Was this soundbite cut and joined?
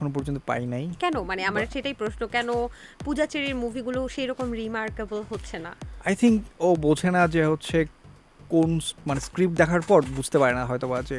no; 0 cuts

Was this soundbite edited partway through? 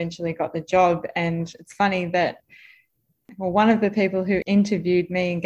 yes; 2 cuts; at 3.2 s, 4.4 s

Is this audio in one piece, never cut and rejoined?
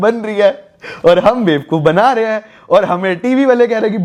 yes; 0 cuts

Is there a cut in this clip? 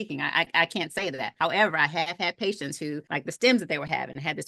yes; 2 cuts; at 1.3 s, 3.0 s

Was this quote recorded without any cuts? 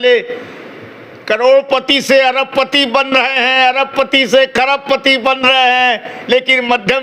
yes; 0 cuts

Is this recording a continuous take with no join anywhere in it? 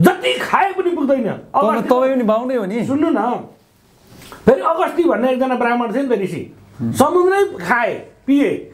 yes; 0 cuts

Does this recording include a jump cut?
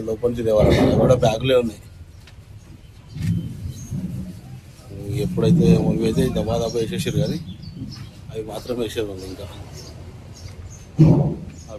no; 0 cuts

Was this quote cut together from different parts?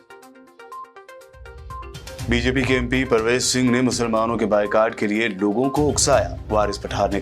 yes; 1 cut; at 1.1 s

